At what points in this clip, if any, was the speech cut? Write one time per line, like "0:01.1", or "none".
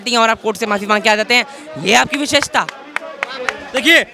none